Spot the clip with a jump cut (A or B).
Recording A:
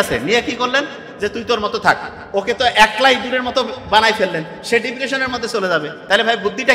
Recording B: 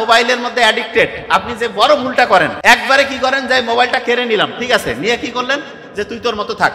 B